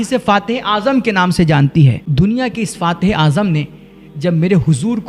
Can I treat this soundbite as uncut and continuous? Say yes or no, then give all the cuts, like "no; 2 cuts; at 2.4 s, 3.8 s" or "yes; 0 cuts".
no; 1 cut; at 2.0 s